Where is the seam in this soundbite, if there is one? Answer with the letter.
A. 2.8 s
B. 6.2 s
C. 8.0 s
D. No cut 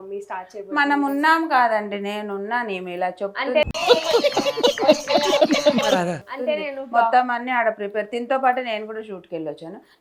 D